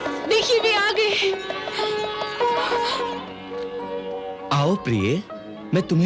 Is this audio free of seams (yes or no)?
no